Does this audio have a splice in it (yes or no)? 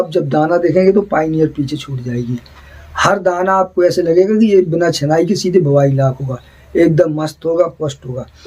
no